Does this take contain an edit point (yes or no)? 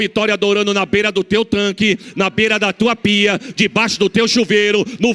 no